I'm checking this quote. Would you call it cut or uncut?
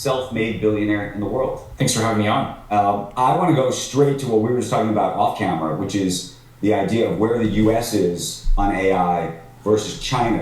cut